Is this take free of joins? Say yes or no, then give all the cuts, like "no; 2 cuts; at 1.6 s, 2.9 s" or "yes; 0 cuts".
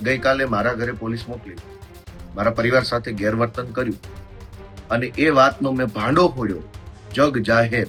yes; 0 cuts